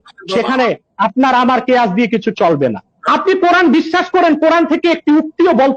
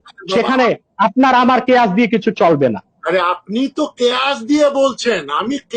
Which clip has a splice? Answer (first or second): first